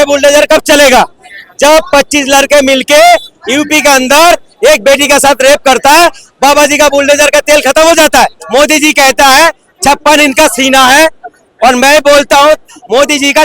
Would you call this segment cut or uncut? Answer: cut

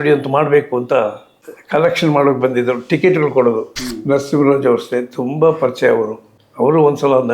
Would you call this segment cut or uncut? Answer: cut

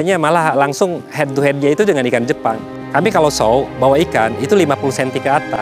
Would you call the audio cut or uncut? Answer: cut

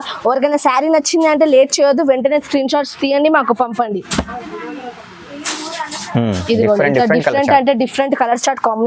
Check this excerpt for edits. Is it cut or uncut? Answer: uncut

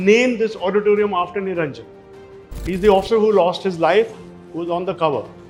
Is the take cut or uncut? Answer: uncut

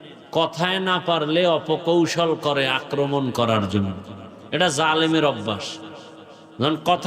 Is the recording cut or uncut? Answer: uncut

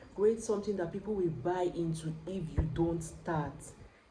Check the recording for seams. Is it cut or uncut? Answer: uncut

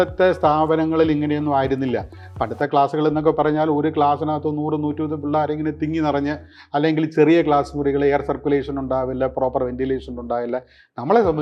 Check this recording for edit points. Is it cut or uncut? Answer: uncut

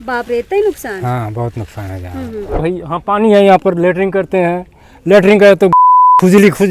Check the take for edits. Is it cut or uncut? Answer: cut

